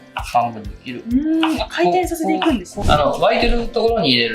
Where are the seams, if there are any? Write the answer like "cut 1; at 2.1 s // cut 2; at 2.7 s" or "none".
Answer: cut 1; at 2.7 s